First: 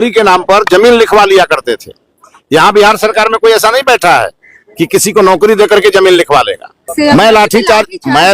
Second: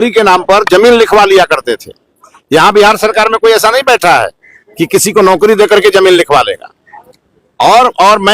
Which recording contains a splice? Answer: first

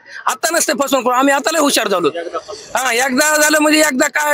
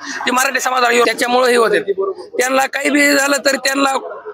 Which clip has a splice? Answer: second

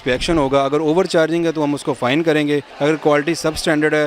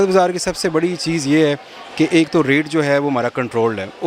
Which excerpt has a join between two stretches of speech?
first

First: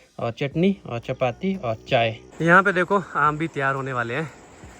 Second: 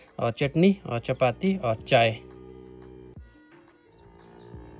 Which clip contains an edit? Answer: first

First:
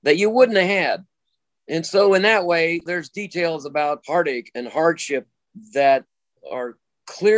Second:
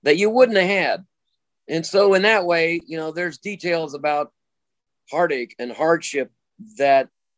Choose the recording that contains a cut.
first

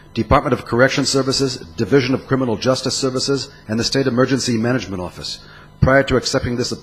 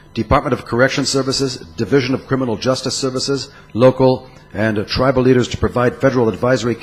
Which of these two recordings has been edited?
first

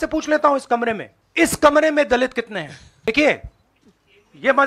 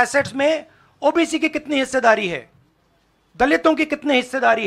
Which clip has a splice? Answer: first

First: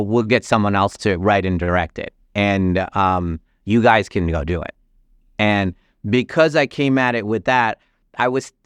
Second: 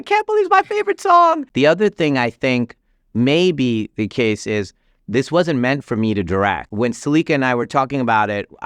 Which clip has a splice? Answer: second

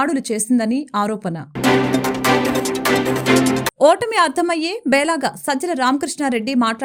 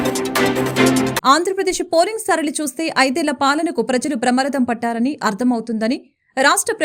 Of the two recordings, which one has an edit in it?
second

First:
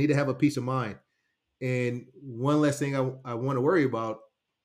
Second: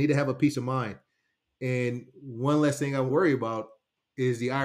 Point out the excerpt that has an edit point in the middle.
second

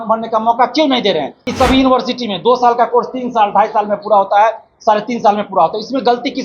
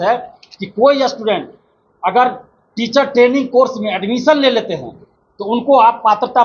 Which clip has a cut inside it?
first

